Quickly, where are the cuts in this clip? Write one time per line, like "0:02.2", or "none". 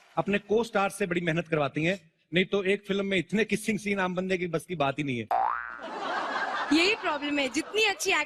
none